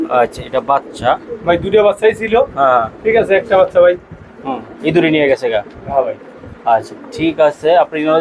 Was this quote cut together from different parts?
no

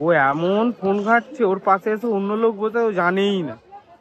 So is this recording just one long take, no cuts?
yes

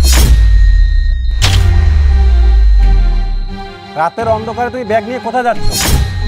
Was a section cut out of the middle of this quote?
no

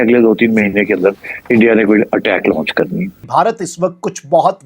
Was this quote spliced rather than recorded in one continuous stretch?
yes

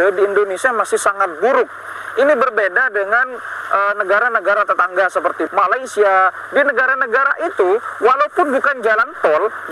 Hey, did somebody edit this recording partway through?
yes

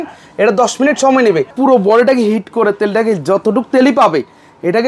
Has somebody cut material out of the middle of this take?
yes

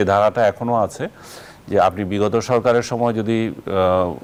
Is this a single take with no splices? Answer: yes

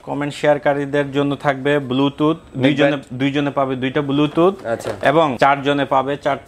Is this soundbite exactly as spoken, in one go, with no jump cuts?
no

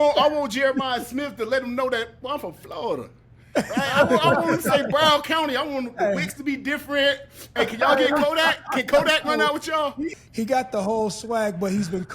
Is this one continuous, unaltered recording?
no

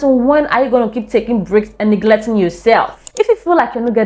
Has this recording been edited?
yes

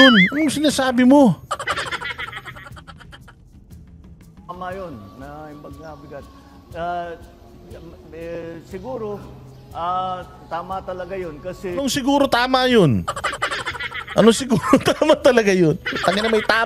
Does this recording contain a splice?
no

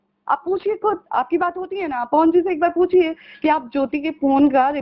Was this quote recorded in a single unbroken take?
yes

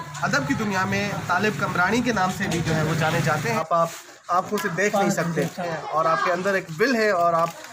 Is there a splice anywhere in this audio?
yes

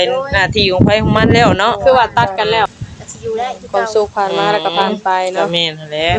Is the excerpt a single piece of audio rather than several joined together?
no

